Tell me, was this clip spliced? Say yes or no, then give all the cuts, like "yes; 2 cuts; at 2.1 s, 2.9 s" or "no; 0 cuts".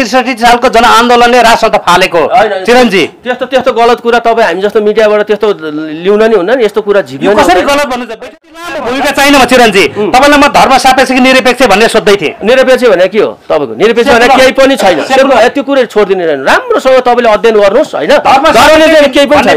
yes; 1 cut; at 8.7 s